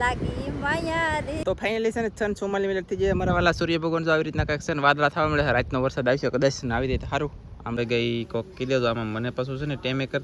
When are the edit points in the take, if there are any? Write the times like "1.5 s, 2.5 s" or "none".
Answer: 1.4 s, 7.8 s

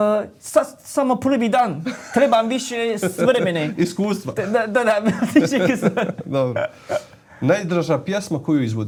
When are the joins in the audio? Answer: none

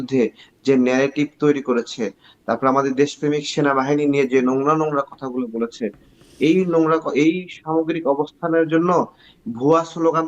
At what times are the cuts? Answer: none

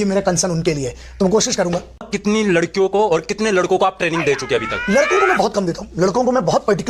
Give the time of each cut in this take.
2.1 s

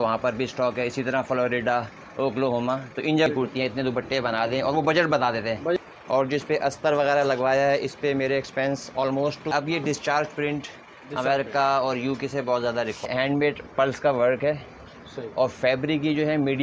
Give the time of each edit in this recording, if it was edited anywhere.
3.3 s, 5.8 s, 9.5 s, 13.1 s

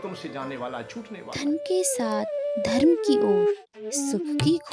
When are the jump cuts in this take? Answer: 1.2 s

